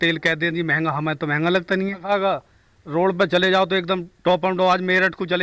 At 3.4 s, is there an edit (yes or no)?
no